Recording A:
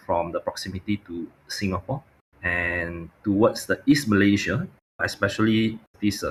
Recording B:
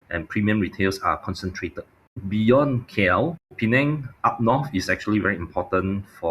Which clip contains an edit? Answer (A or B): B